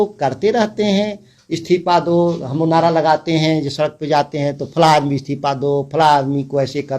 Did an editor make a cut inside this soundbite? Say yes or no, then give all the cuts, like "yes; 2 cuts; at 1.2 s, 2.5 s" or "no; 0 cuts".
no; 0 cuts